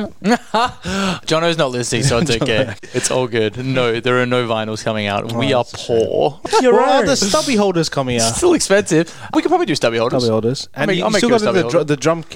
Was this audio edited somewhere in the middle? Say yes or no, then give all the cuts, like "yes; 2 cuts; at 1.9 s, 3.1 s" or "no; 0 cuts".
yes; 1 cut; at 2.8 s